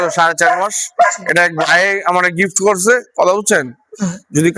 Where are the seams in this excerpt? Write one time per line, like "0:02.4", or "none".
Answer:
none